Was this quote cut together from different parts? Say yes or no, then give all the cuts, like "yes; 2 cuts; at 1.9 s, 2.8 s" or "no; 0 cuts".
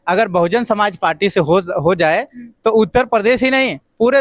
no; 0 cuts